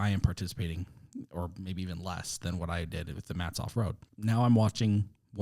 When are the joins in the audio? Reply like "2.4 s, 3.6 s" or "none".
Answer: 4.1 s